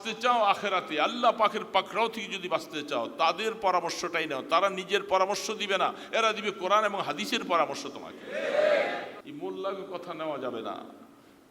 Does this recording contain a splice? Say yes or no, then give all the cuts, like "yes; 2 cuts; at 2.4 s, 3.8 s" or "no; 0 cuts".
yes; 1 cut; at 9.2 s